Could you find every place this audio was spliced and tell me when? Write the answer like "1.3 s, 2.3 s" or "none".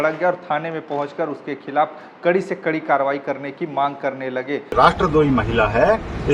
4.7 s